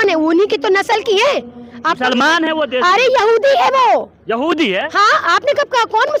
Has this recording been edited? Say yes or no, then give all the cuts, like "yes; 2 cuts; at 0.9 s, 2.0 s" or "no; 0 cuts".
no; 0 cuts